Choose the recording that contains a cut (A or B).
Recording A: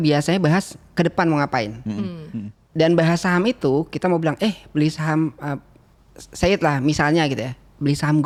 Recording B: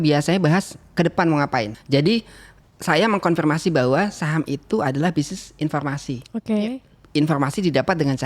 B